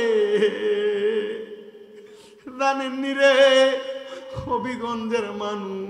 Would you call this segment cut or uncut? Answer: cut